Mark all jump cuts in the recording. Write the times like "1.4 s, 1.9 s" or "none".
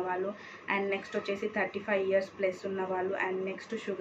none